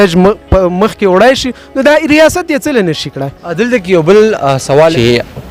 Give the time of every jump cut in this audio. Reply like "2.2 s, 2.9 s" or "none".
none